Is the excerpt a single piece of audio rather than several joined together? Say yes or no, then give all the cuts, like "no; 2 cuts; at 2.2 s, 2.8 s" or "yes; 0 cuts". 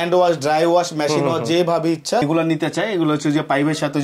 no; 1 cut; at 2.2 s